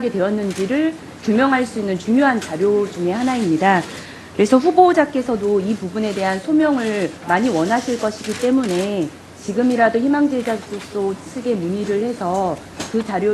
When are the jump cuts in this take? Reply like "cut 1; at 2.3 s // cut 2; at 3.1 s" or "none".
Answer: cut 1; at 9.2 s